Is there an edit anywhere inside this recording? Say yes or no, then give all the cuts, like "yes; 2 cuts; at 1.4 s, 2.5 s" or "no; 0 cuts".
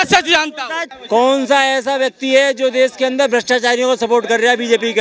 yes; 1 cut; at 0.9 s